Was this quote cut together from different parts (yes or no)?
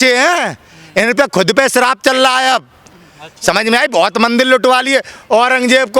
no